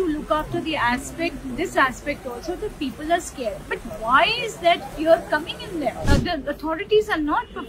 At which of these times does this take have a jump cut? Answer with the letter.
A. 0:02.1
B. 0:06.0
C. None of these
B